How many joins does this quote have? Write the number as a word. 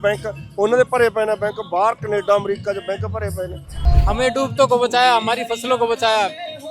one